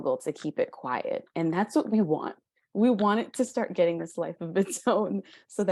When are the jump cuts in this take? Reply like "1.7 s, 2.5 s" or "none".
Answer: none